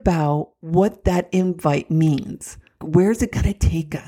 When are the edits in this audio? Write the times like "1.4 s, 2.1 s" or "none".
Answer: 2.8 s